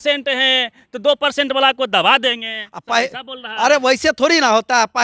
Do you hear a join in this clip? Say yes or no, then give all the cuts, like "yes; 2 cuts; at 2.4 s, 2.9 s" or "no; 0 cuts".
no; 0 cuts